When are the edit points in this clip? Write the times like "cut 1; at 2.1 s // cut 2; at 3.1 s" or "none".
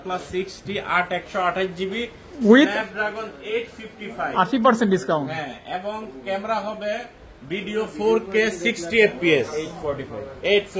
none